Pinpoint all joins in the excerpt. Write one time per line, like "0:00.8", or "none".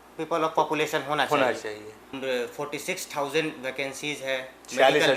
0:02.2